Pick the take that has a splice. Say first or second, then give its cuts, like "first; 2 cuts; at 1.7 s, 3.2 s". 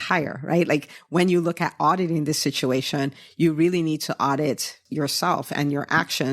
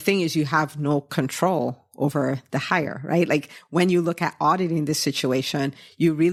first; 1 cut; at 4.8 s